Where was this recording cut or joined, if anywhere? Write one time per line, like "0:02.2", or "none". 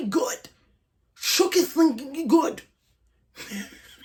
none

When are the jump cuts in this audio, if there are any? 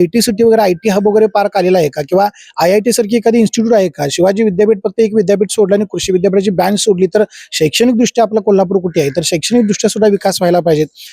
none

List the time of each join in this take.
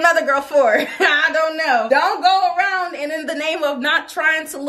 0:01.8

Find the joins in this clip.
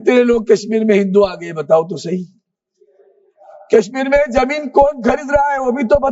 none

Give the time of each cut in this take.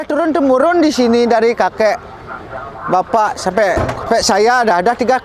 none

